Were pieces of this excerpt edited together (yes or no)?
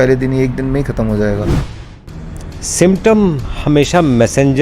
yes